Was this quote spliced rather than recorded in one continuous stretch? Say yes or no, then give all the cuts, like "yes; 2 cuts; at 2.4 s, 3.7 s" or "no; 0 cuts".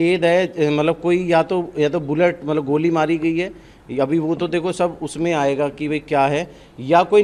no; 0 cuts